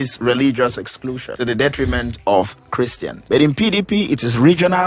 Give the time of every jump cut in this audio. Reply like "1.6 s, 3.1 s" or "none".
1.3 s, 3.1 s